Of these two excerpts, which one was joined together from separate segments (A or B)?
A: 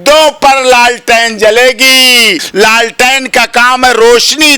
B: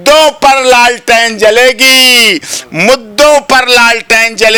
A